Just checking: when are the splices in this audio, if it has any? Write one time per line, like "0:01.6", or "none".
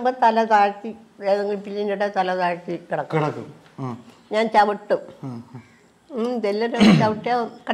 none